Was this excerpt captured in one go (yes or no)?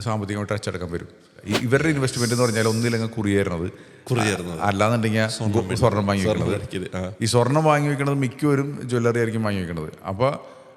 no